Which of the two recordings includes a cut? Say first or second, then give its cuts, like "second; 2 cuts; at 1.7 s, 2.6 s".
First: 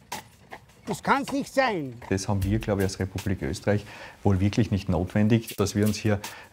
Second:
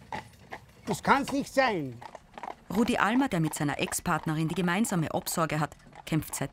first; 2 cuts; at 2.1 s, 5.5 s